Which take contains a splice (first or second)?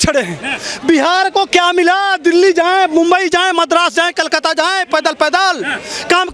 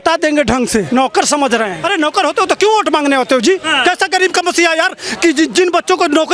second